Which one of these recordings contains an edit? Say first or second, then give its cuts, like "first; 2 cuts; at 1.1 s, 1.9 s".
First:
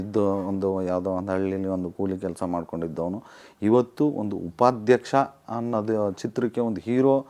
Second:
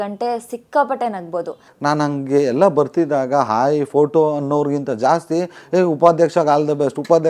second; 1 cut; at 1.6 s